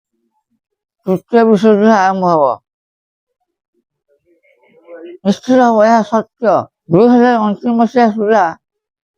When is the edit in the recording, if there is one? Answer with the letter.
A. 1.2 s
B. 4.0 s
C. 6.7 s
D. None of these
C